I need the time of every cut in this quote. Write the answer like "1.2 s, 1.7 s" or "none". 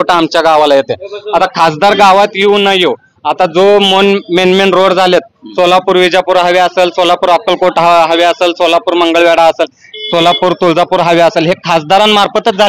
none